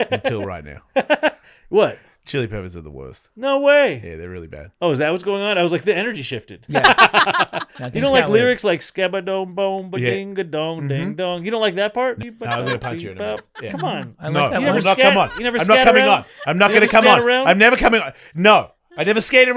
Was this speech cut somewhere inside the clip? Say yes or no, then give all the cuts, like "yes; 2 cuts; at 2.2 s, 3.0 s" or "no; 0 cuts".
yes; 1 cut; at 12.2 s